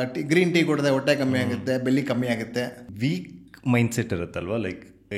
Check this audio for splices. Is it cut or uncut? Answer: cut